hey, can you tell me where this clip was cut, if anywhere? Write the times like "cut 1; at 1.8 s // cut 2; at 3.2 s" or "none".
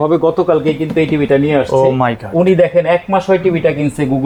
none